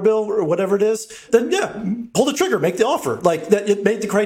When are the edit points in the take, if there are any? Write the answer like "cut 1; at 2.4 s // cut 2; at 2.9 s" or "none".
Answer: cut 1; at 1.2 s